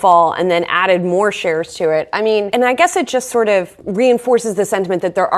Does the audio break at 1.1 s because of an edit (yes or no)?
no